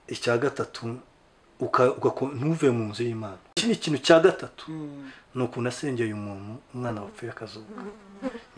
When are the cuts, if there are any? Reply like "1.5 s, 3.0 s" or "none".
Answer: 3.5 s